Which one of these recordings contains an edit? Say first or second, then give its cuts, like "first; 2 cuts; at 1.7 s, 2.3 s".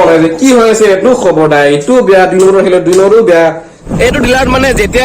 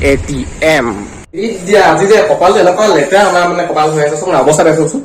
first; 1 cut; at 3.8 s